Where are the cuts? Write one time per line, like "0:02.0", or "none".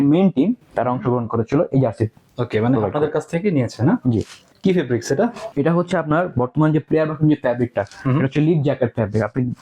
0:04.4
0:05.4

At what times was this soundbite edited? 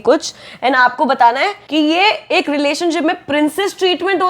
0:01.6

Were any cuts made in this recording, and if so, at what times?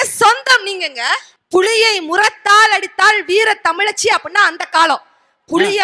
0:01.3

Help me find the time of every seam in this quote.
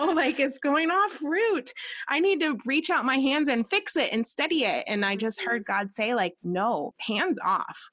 0:06.8

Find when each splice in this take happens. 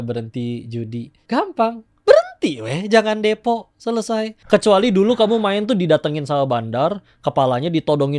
0:01.1
0:04.3

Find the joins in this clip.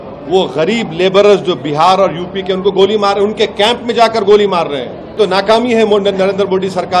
0:05.2

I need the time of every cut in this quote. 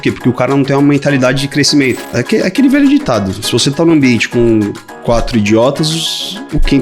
0:02.0

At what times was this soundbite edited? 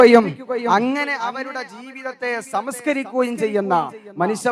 none

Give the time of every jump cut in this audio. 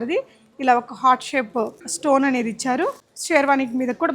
0:01.8
0:03.1

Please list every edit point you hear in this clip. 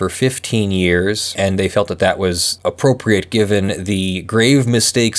0:01.3

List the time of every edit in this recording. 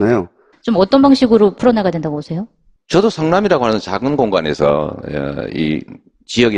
none

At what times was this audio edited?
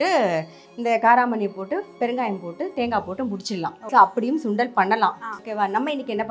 0:03.8
0:05.4

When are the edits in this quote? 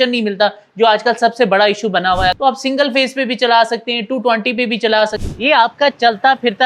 0:02.4
0:05.1

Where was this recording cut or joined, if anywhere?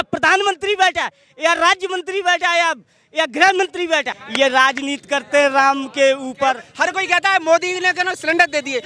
0:04.2
0:06.7

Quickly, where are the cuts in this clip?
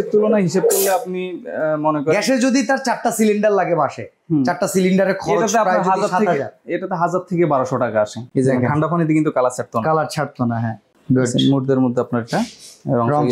0:08.2

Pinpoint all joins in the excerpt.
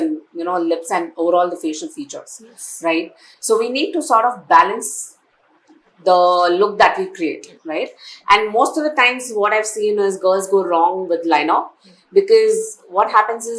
none

